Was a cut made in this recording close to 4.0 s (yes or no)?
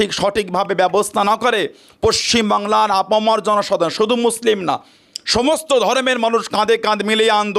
no